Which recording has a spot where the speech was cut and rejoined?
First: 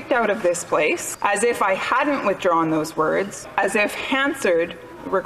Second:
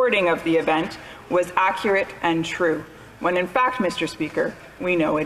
first; 2 cuts; at 1.1 s, 3.5 s

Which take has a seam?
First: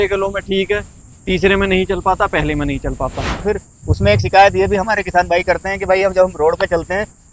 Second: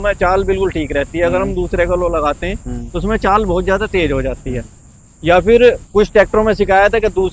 first; 1 cut; at 3.4 s

